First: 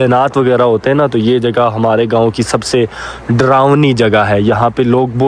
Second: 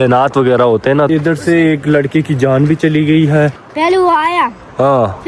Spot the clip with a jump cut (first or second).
second